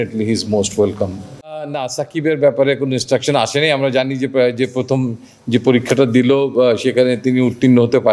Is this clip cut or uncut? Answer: cut